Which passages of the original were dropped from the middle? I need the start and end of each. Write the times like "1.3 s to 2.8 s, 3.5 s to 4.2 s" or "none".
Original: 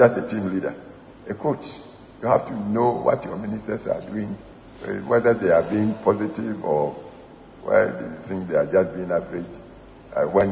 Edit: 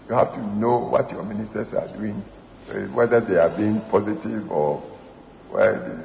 none